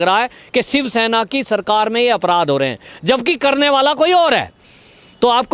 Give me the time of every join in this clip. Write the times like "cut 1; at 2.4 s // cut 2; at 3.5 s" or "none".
none